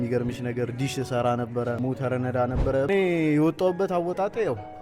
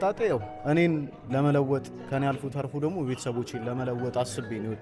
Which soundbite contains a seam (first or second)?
first